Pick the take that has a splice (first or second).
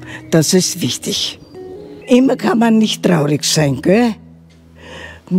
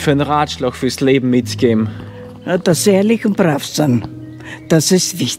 first